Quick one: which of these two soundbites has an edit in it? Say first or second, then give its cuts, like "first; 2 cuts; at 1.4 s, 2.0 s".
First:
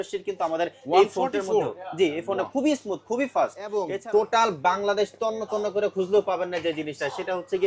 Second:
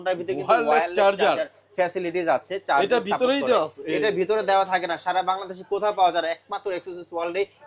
first; 1 cut; at 3.9 s